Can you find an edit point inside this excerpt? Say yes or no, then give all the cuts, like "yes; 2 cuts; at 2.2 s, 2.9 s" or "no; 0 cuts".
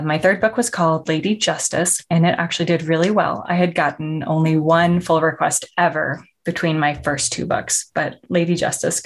no; 0 cuts